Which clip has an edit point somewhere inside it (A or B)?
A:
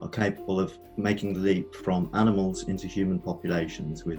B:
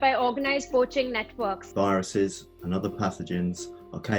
B